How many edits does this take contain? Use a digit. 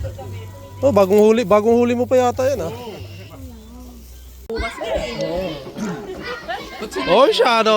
1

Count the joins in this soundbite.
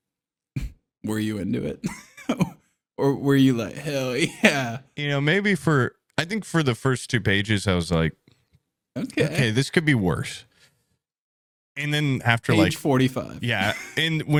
0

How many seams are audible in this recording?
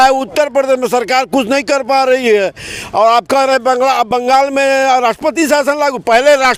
0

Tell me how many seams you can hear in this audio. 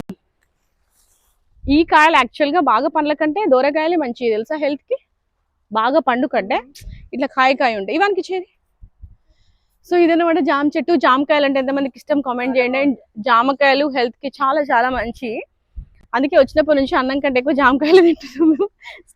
0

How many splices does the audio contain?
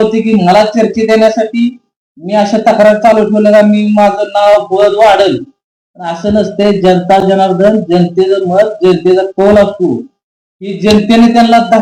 0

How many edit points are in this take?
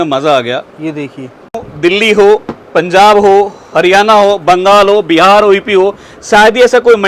1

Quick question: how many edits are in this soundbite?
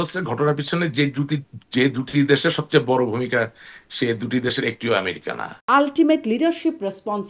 1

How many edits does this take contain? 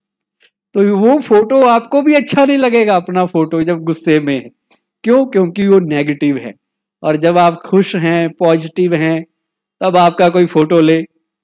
0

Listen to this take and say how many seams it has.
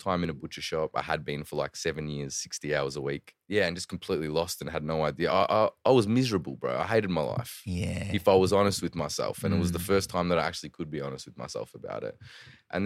2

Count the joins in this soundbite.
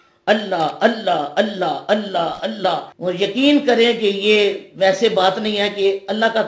1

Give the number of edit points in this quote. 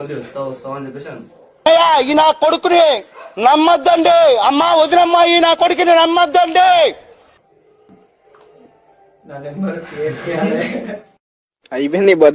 0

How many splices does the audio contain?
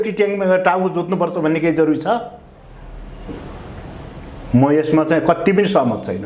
0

